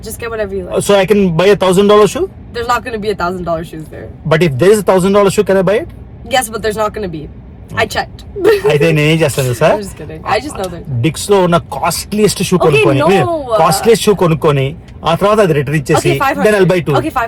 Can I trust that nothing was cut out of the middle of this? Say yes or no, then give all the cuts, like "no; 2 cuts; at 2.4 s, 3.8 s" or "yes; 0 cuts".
yes; 0 cuts